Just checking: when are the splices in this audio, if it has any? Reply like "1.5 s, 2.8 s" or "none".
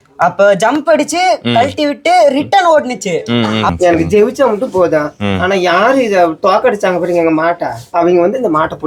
3.7 s